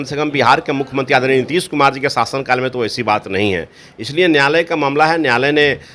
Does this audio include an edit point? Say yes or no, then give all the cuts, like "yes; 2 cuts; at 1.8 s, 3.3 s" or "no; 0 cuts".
no; 0 cuts